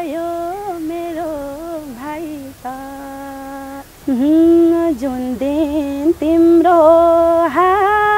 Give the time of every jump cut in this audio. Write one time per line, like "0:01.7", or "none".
0:03.9